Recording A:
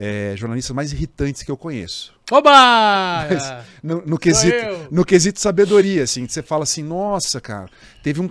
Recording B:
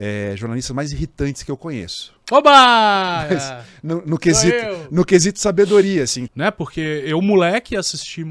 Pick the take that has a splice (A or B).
B